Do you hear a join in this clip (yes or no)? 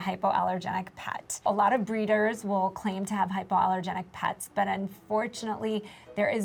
no